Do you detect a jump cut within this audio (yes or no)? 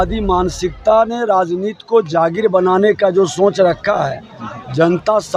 no